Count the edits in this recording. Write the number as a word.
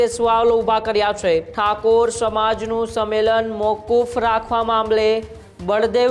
one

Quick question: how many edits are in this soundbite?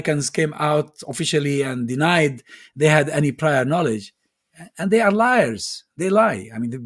zero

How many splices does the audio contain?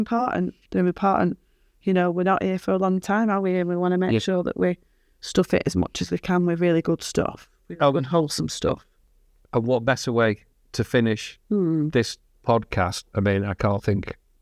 zero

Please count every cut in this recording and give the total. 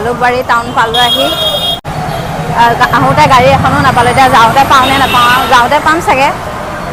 zero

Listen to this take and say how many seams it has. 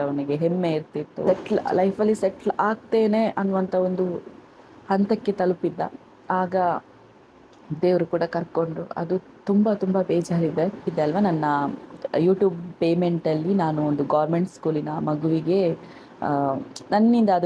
two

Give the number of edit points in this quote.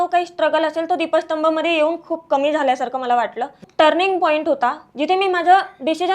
one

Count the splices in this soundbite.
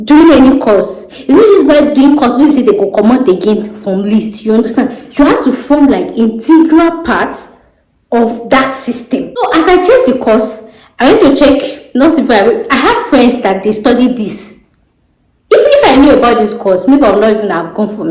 one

